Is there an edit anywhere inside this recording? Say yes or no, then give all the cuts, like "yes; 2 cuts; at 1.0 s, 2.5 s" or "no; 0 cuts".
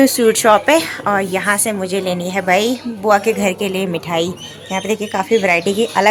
no; 0 cuts